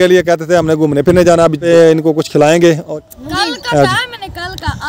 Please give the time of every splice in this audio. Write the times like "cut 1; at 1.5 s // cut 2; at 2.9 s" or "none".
cut 1; at 1.6 s // cut 2; at 2.9 s